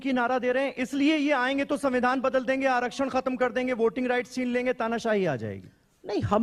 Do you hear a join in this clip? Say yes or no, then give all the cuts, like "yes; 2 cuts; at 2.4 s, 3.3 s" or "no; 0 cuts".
no; 0 cuts